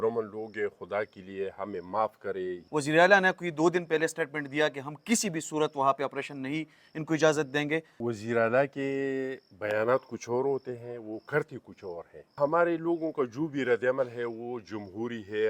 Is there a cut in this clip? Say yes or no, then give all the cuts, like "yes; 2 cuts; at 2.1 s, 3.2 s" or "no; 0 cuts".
yes; 3 cuts; at 2.6 s, 7.9 s, 12.3 s